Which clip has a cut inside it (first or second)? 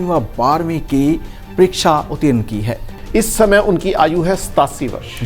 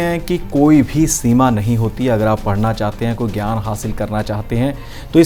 first